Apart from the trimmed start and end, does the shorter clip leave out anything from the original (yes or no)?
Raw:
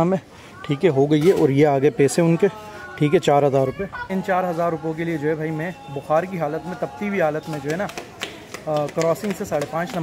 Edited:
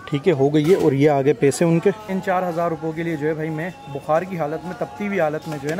yes